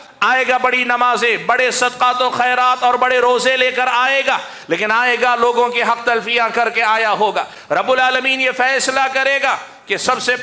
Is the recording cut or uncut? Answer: uncut